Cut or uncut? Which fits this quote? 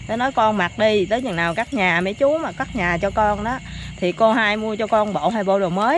uncut